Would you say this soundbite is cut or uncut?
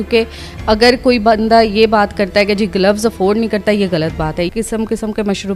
cut